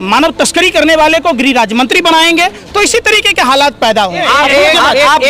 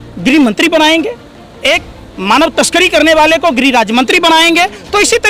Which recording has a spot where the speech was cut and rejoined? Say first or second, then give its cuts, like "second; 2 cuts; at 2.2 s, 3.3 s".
first; 1 cut; at 4.2 s